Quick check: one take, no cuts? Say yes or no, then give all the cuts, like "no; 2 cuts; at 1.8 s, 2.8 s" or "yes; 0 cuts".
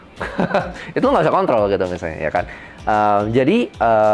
yes; 0 cuts